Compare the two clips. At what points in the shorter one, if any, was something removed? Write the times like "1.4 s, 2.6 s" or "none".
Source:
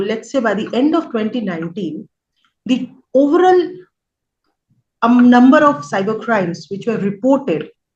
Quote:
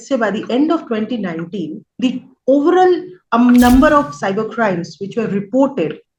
1.8 s, 3.1 s